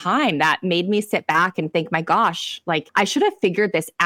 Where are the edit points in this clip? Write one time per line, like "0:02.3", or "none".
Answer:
0:02.9